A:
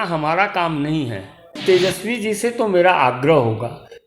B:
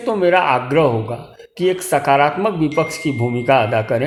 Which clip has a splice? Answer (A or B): A